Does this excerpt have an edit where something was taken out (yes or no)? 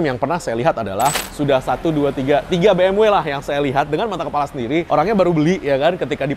yes